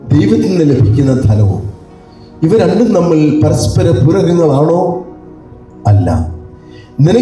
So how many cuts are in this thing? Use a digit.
0